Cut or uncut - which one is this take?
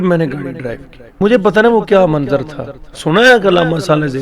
cut